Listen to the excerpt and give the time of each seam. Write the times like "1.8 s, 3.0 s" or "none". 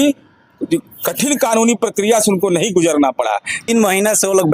3.5 s